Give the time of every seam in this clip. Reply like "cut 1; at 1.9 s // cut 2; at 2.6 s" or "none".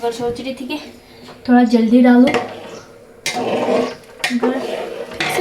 none